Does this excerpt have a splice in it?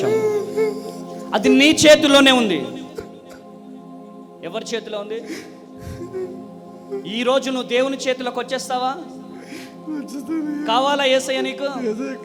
no; 0 cuts

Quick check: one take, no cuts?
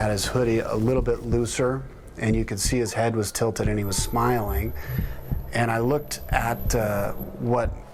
yes; 0 cuts

